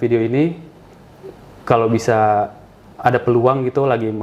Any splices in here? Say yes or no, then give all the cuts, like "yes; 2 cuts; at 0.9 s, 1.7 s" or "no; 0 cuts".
no; 0 cuts